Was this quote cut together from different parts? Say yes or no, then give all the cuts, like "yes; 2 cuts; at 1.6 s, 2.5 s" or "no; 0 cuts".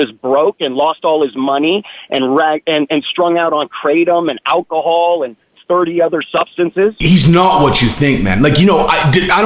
yes; 1 cut; at 7.0 s